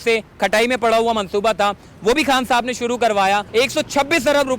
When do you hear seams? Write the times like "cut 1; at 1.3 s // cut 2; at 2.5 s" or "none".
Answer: cut 1; at 3.5 s